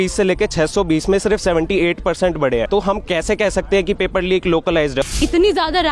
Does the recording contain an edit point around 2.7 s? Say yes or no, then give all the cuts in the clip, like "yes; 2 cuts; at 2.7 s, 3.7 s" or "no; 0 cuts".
yes; 2 cuts; at 2.7 s, 5.1 s